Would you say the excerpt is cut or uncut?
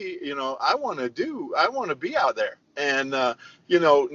uncut